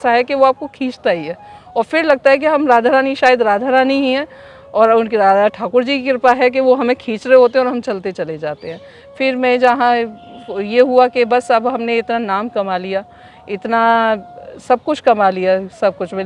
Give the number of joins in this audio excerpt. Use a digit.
0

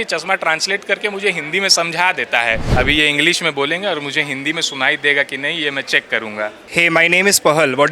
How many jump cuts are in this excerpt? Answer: 2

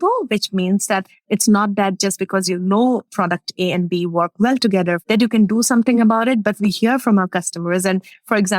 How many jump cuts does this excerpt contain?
2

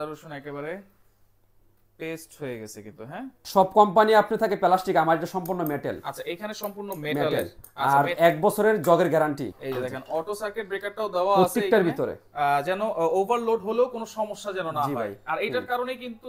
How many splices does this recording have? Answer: 3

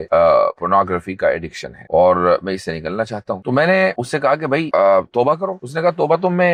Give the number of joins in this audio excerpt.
0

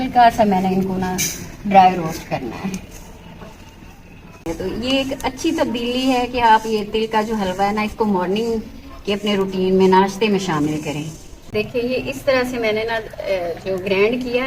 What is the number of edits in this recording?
2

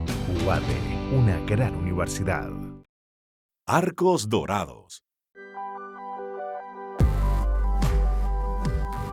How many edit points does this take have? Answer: 0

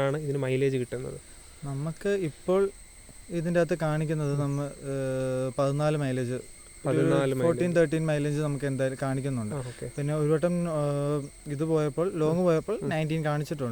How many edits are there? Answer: 0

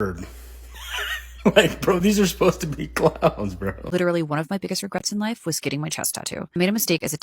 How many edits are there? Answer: 1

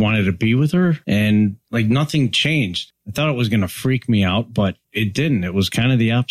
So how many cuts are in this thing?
4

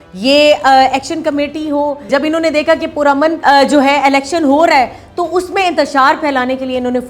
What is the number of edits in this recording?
2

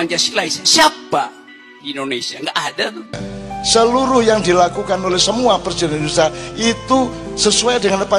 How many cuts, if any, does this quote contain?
1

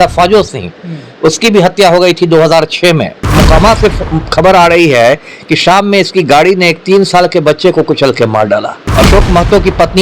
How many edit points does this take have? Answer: 2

